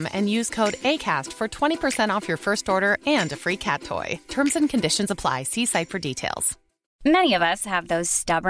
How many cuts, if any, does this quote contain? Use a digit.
1